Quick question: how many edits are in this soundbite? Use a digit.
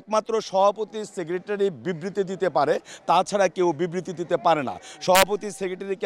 0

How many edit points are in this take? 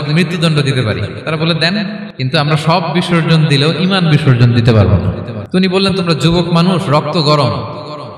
2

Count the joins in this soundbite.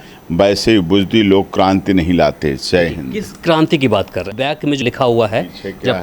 2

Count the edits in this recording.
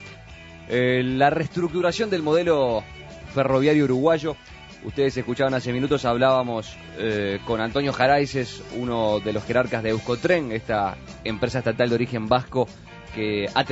1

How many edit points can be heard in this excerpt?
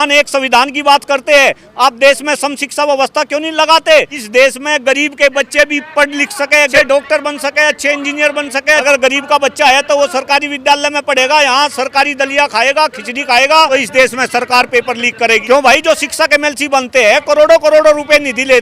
5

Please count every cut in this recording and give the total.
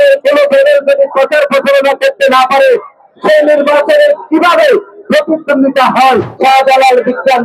1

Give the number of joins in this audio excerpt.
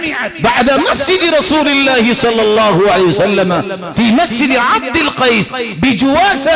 0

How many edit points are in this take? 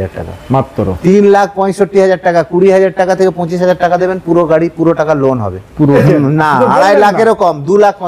1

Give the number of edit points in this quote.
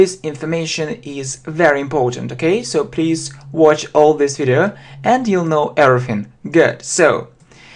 0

